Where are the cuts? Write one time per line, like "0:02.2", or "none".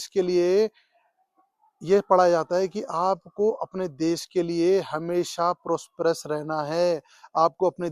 none